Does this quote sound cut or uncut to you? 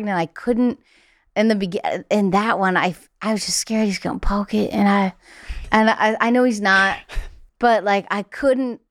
uncut